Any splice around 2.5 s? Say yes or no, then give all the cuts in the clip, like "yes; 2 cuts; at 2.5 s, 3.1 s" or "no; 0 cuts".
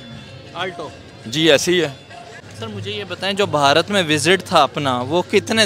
yes; 1 cut; at 2.5 s